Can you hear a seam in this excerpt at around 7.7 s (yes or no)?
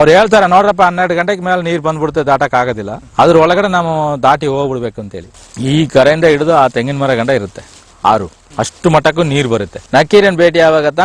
no